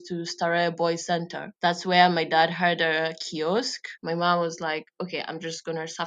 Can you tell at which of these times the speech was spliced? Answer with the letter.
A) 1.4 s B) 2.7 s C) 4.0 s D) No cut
C